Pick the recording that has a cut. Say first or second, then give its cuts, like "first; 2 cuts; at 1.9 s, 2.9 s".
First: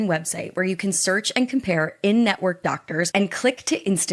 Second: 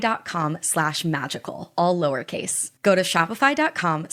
first; 1 cut; at 3.1 s